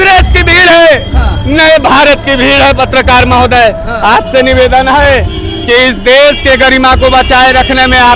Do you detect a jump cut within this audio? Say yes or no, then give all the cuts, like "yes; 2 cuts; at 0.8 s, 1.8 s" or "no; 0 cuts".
no; 0 cuts